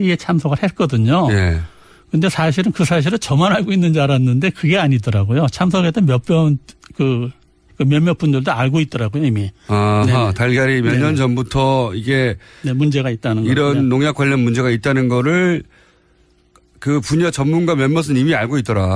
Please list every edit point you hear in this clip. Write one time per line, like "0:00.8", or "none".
0:17.4